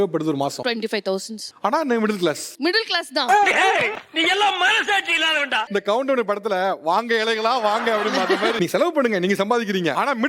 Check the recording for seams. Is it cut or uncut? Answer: uncut